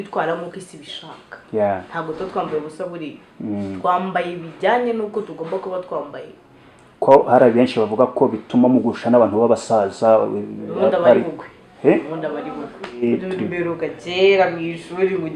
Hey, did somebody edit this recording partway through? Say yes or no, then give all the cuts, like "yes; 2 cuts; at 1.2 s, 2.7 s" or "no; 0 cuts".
yes; 1 cut; at 13.1 s